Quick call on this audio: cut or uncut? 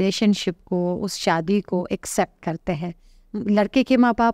uncut